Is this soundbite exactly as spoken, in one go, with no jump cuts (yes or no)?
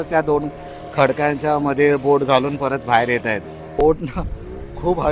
no